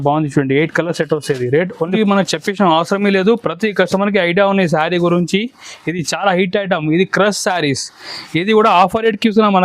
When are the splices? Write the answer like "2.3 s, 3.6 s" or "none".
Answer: 1.9 s